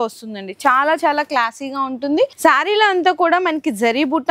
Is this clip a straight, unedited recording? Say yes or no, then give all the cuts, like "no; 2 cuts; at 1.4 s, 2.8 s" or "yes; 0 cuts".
no; 1 cut; at 2.3 s